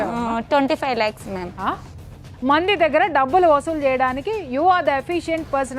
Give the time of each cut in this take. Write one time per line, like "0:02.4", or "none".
0:01.9

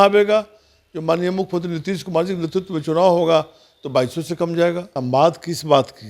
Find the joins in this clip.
0:04.9

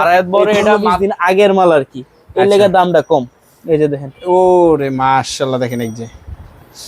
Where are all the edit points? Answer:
none

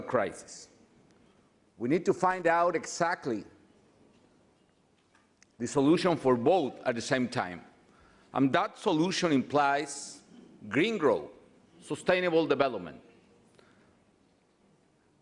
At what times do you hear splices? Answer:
0:02.8

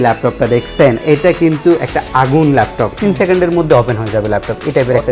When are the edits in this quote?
0:02.9

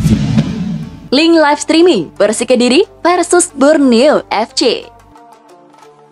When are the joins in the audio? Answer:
0:04.9

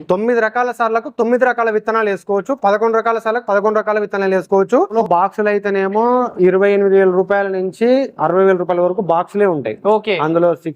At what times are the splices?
0:04.9

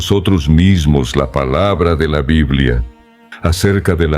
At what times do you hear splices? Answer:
0:03.2

